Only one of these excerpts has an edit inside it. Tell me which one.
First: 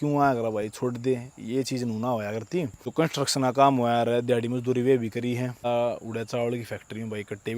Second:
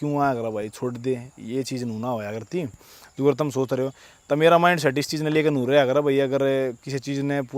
first; 2 cuts; at 2.8 s, 5.6 s

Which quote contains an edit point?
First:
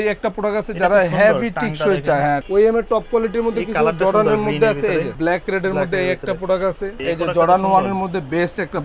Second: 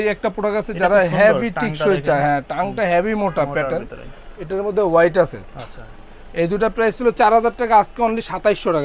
first; 3 cuts; at 2.4 s, 5.1 s, 7.0 s

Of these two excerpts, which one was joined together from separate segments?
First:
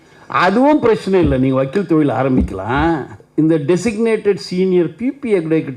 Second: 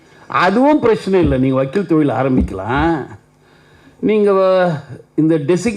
first; 1 cut; at 3.2 s

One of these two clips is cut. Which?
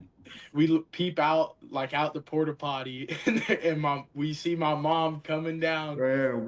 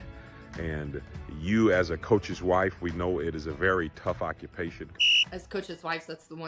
second; 1 cut; at 5.1 s

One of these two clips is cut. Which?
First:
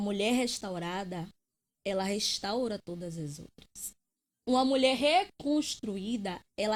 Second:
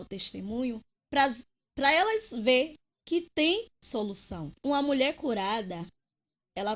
second; 1 cut; at 4.6 s

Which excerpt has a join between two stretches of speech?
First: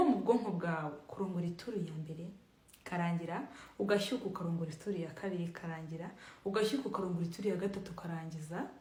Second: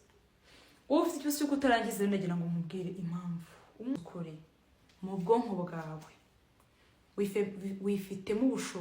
second; 1 cut; at 3.9 s

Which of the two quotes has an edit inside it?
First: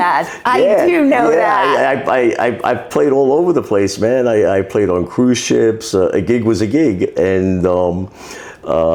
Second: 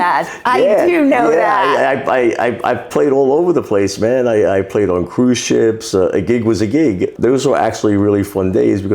second; 1 cut; at 7.1 s

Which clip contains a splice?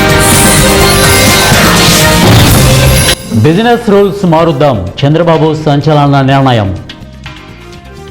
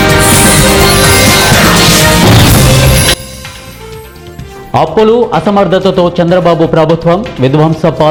first; 1 cut; at 3.2 s

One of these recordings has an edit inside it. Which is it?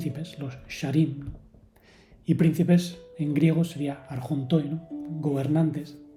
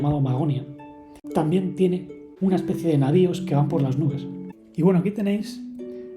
second; 2 cuts; at 1.1 s, 4.6 s

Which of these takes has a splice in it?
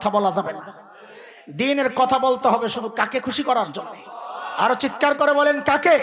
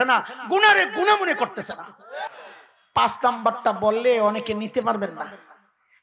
second; 1 cut; at 2.3 s

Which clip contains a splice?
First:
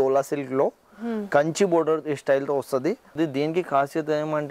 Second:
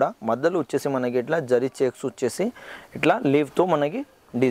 first; 1 cut; at 3.1 s

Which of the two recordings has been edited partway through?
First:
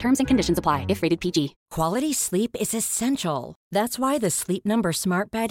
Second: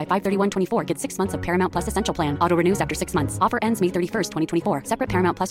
first; 1 cut; at 1.6 s

